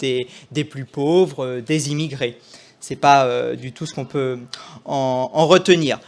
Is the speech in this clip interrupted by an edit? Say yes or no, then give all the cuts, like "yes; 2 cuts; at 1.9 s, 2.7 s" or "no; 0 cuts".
no; 0 cuts